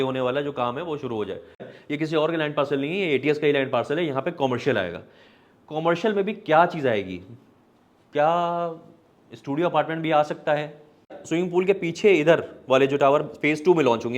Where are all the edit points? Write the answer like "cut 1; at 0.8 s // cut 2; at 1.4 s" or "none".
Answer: cut 1; at 1.7 s // cut 2; at 11.2 s